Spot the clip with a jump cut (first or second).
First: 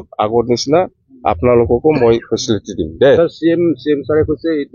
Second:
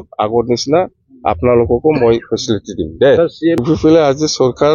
second